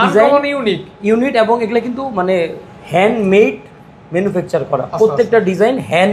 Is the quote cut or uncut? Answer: uncut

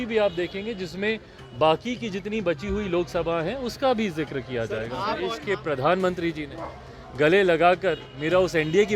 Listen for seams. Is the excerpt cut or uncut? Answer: cut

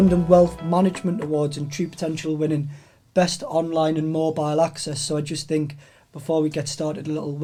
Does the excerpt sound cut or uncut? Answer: uncut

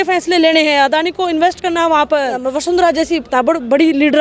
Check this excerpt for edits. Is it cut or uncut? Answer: cut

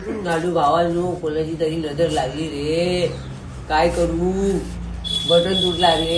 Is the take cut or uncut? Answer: uncut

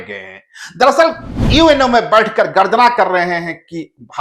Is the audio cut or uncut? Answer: cut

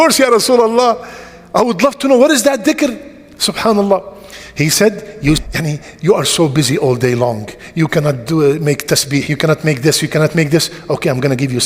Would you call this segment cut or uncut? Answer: cut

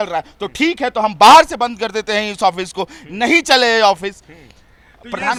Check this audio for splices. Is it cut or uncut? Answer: uncut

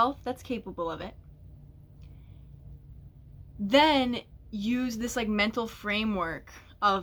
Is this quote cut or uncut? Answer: uncut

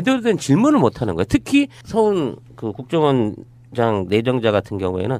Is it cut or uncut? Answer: cut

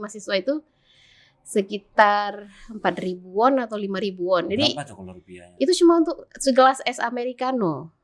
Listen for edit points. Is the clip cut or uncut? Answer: uncut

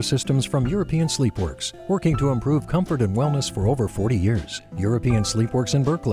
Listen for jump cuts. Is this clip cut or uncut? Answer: uncut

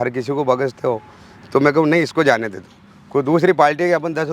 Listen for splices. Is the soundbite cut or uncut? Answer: uncut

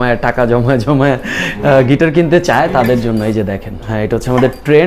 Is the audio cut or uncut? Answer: cut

